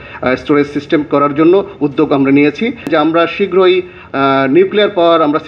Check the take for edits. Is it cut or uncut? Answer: cut